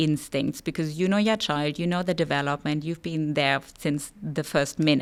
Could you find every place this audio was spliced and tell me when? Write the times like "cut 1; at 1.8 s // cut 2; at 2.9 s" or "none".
none

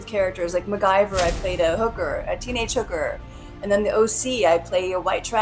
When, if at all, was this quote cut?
none

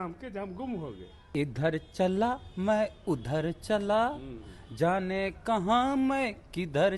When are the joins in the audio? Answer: cut 1; at 1.1 s

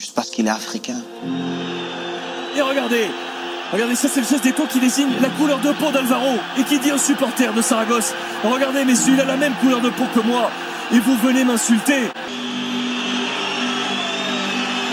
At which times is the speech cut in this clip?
cut 1; at 12.2 s

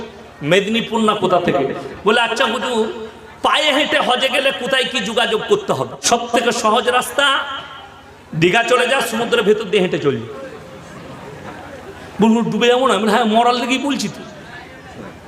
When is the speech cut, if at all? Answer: cut 1; at 6.0 s

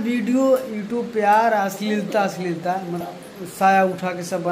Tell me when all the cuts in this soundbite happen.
cut 1; at 3.0 s

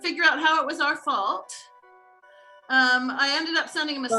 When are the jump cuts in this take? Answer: none

